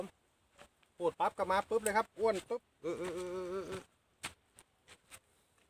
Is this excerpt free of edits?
no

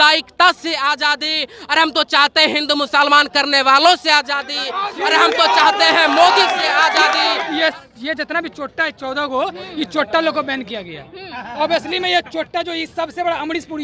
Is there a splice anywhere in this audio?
yes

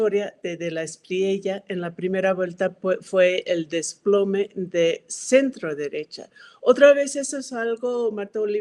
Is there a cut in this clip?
no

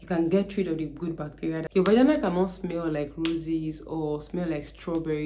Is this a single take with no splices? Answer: no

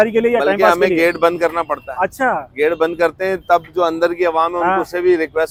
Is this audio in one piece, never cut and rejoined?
yes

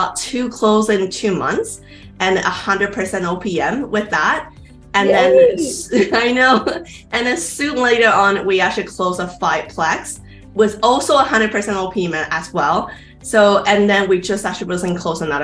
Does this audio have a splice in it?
no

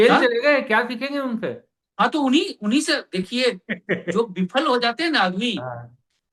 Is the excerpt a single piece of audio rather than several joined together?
yes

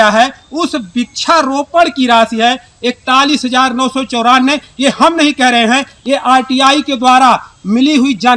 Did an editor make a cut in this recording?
no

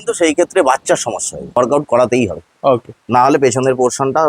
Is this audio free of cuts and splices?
no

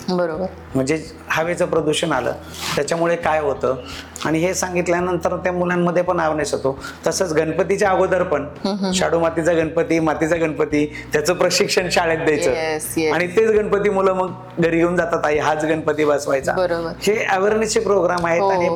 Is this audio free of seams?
yes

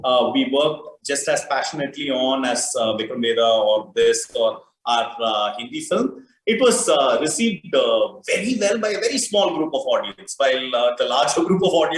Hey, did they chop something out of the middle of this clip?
no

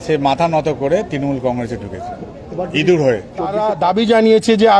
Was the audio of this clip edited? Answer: yes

